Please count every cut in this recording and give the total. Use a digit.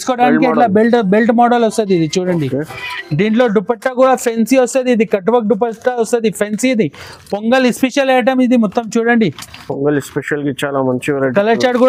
0